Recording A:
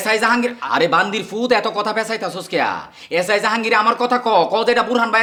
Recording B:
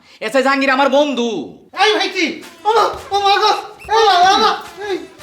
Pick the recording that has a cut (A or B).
B